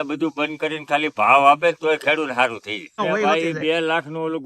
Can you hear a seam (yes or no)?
yes